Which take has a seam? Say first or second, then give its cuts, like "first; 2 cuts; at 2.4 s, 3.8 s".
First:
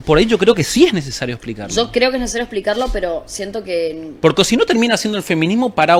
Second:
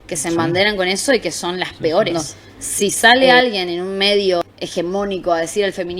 second; 2 cuts; at 2.1 s, 4.4 s